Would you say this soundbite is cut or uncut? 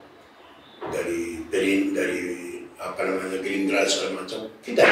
uncut